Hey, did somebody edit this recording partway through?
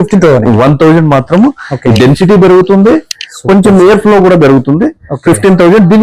no; 0 cuts

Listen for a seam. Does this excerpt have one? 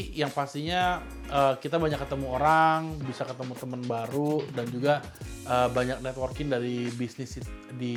no; 0 cuts

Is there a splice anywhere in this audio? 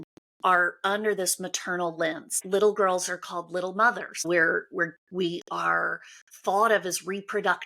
yes; 2 cuts; at 2.4 s, 4.2 s

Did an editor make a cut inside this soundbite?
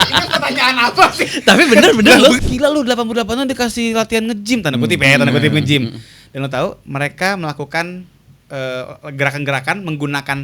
yes; 1 cut; at 2.4 s

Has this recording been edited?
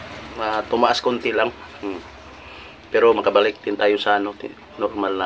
no; 0 cuts

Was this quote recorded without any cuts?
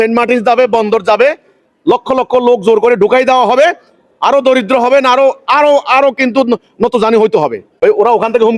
no; 1 cut; at 7.6 s

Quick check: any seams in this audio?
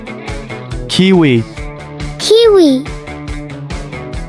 yes; 1 cut; at 0.9 s

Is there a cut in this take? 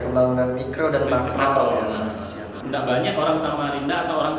yes; 1 cut; at 2.6 s

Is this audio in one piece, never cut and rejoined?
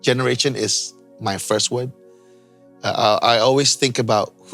yes; 0 cuts

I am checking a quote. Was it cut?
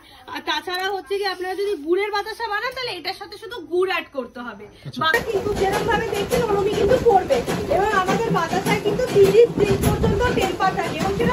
yes; 1 cut; at 5.1 s

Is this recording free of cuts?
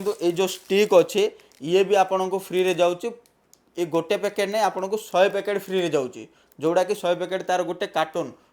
yes; 0 cuts

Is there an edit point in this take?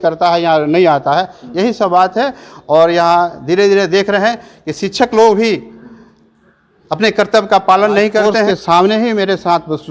yes; 1 cut; at 8.4 s

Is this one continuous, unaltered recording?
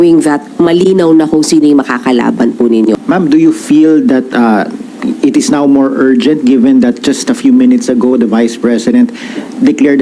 no; 1 cut; at 3.0 s

